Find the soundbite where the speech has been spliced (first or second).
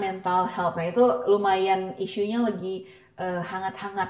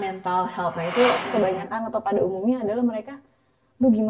second